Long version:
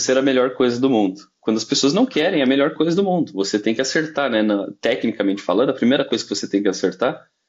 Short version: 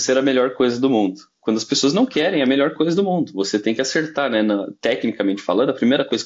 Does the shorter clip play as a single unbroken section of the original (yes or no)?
yes